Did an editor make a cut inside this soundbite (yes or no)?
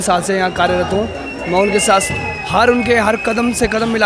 no